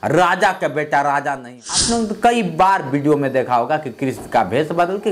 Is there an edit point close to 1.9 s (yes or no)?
yes